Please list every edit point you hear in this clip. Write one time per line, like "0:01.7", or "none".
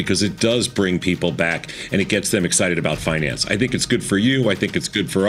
none